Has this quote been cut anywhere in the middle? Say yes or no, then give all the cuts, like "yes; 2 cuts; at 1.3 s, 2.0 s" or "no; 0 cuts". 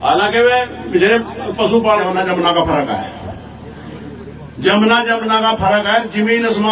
yes; 1 cut; at 2.0 s